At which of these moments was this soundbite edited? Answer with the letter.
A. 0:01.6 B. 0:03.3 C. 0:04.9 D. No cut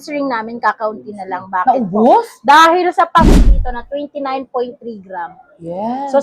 B